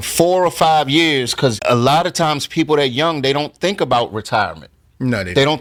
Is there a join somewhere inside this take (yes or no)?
no